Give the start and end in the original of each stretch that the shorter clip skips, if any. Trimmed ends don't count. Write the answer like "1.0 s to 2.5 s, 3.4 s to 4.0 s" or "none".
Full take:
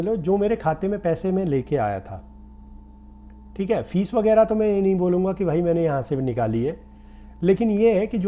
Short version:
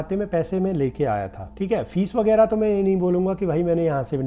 2.1 s to 3.4 s